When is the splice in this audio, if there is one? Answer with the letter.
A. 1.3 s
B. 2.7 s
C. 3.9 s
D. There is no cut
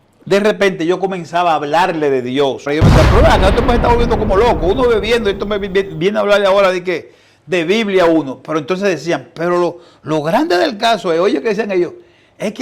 B